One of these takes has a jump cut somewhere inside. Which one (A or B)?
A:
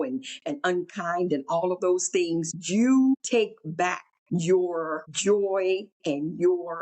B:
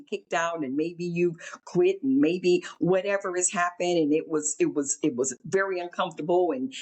A